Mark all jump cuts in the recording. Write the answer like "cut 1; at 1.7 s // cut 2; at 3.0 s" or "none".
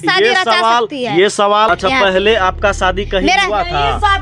cut 1; at 1.7 s